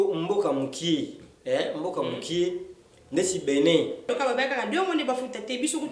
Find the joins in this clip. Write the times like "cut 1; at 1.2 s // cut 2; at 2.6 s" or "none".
cut 1; at 4.1 s